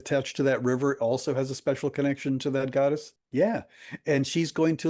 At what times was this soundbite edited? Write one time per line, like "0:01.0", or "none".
0:03.2